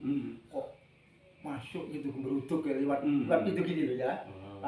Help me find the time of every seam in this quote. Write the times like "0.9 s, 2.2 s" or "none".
none